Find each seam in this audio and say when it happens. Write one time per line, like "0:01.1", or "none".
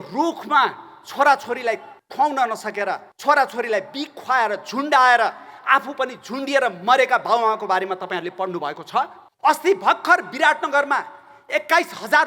0:02.0
0:03.1
0:09.2